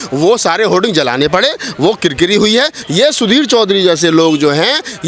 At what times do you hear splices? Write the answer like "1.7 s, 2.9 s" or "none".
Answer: 2.8 s